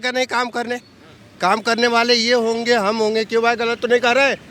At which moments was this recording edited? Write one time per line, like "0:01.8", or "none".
none